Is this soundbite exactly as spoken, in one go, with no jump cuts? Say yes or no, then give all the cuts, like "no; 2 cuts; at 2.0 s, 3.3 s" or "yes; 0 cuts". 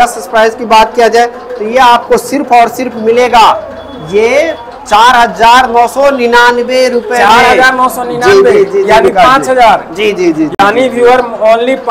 yes; 0 cuts